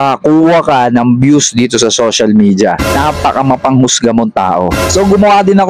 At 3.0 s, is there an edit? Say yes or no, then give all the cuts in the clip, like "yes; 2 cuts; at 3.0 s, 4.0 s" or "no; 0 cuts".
yes; 2 cuts; at 3.0 s, 4.8 s